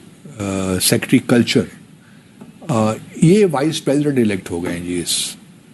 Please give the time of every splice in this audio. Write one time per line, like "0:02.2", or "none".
none